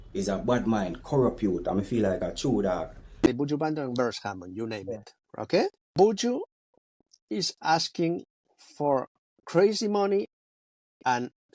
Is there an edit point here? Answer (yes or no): yes